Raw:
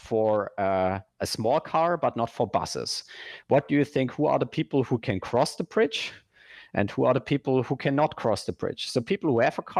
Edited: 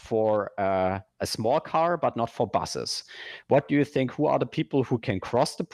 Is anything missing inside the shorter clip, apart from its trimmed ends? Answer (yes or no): no